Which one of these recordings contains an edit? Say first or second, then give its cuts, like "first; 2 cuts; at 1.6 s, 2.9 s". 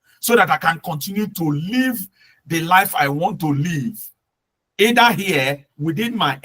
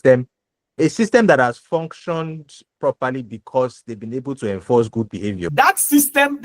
second; 1 cut; at 5.4 s